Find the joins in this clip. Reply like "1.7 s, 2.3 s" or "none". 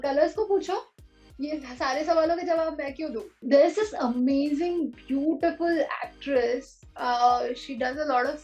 3.4 s